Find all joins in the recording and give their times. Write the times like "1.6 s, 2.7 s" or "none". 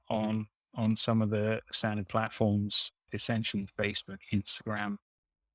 1.7 s, 3.1 s